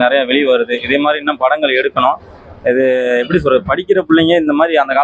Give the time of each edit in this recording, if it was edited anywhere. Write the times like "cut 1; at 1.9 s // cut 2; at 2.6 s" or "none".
none